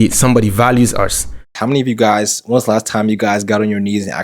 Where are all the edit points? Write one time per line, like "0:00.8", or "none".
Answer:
0:01.5